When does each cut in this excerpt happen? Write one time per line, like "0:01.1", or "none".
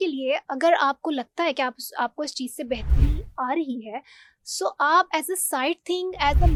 none